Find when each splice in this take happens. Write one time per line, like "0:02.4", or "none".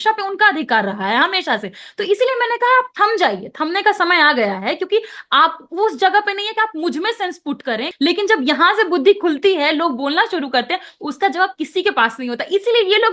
0:07.9

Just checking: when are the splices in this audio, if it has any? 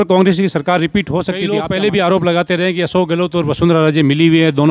0:01.4

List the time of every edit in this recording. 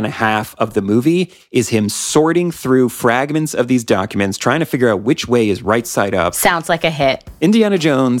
0:06.3
0:07.3

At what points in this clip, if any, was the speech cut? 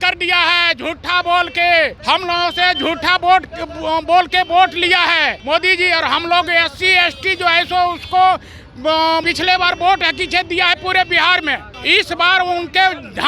0:02.0
0:05.4
0:09.2
0:11.7

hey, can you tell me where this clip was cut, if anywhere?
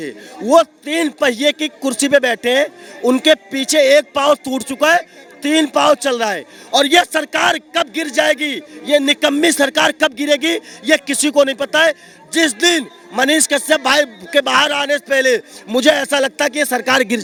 none

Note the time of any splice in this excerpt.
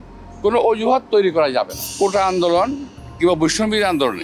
0:01.8

